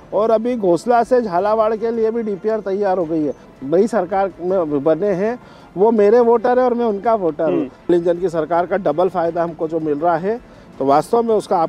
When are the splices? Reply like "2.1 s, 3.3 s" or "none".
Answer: 3.5 s, 7.9 s